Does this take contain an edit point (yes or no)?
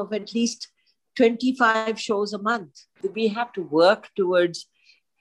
yes